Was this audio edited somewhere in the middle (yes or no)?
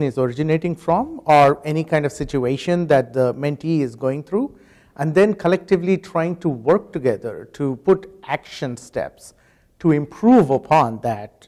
no